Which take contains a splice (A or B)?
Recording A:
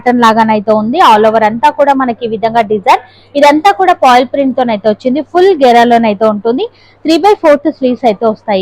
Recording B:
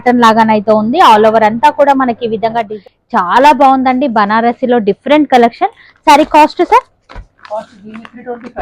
B